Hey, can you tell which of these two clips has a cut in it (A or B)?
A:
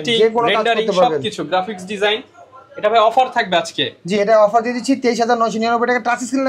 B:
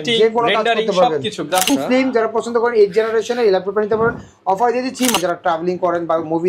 B